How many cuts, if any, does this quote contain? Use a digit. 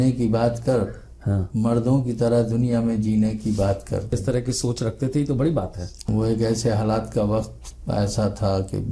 2